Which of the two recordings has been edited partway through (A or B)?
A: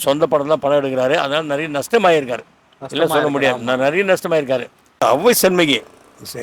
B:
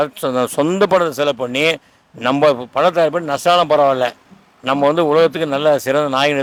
A